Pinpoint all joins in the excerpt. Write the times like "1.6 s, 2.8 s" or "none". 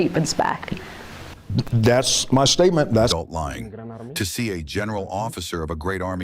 3.1 s